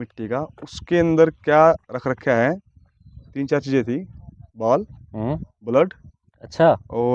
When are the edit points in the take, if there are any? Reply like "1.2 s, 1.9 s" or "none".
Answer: none